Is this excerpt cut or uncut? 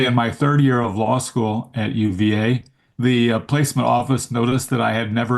uncut